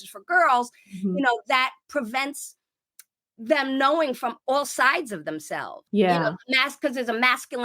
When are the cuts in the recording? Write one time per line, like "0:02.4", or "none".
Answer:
0:05.8

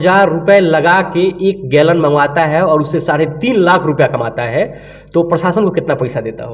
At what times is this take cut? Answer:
none

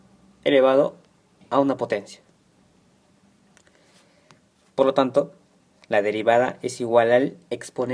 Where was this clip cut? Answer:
0:06.7

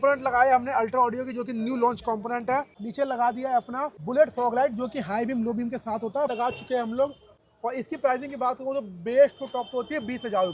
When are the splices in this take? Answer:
0:02.8
0:03.9
0:06.3
0:07.3

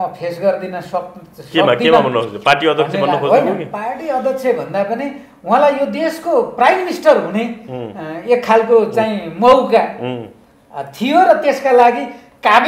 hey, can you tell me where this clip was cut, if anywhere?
none

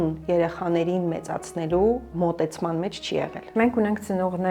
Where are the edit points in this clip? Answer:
0:02.1
0:03.4

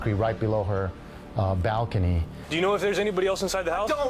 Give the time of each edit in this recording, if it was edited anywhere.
0:02.4

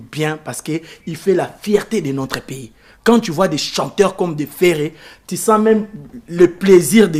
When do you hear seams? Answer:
none

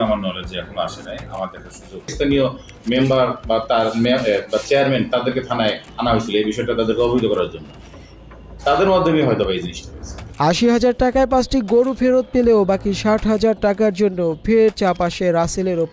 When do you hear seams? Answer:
none

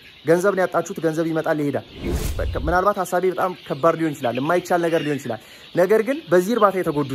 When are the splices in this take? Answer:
0:02.1

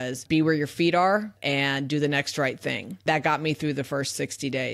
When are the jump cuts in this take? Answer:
0:03.0

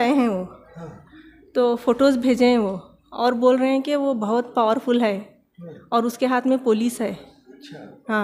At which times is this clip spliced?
none

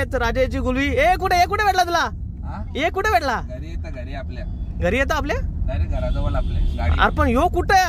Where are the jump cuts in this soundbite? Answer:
none

